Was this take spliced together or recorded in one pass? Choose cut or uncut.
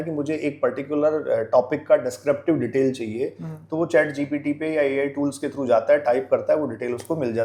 uncut